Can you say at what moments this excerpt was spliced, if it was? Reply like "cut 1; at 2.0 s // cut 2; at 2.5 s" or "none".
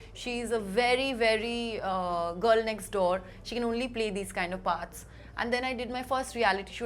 none